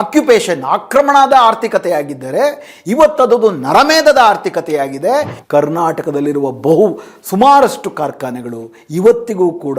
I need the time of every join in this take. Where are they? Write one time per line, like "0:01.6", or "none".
0:05.4